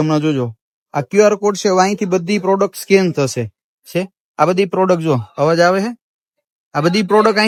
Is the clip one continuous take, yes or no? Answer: yes